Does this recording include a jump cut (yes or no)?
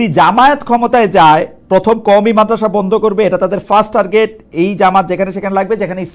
no